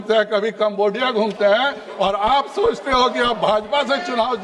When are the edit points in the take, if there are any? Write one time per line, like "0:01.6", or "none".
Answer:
none